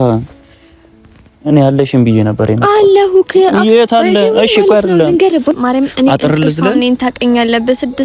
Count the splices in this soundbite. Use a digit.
1